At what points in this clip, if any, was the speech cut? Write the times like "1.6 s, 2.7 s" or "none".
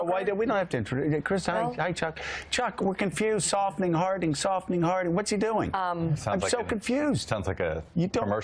none